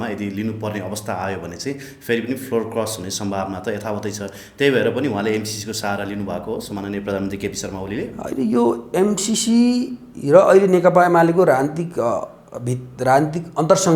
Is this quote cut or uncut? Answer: uncut